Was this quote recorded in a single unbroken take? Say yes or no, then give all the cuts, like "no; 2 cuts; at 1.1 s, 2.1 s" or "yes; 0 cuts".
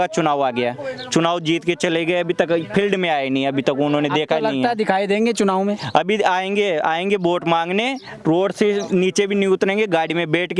yes; 0 cuts